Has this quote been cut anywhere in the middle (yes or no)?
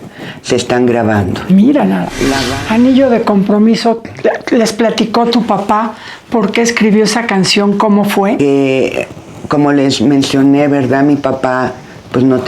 yes